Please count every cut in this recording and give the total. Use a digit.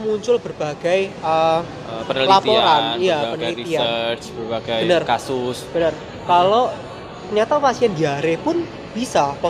0